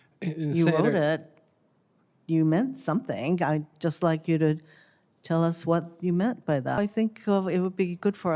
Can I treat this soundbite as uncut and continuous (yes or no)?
no